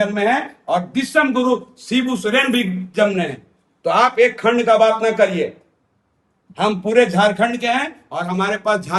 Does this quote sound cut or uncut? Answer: uncut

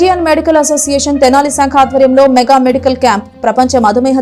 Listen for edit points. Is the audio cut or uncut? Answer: uncut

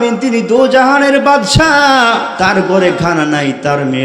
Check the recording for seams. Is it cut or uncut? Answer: cut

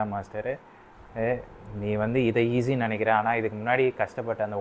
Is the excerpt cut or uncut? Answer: uncut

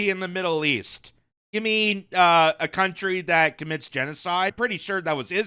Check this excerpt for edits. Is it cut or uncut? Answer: cut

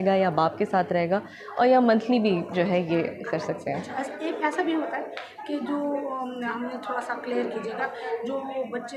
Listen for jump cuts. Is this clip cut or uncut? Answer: uncut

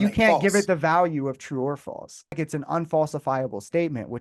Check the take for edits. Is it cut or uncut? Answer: cut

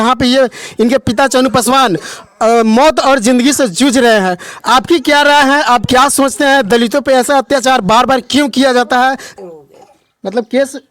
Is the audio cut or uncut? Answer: cut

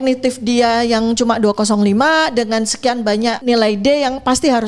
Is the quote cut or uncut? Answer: cut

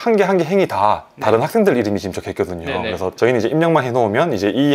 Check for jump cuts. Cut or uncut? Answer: uncut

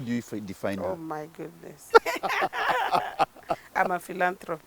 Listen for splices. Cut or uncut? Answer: cut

